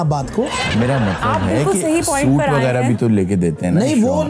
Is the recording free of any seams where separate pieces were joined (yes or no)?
yes